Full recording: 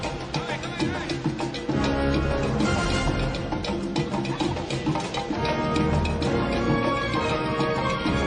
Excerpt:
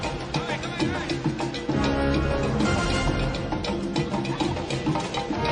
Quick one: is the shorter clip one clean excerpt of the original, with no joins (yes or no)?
yes